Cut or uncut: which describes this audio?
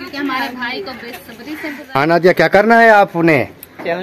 cut